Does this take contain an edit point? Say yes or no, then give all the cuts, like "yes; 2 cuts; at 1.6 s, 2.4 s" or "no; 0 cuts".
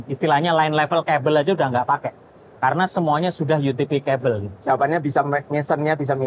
no; 0 cuts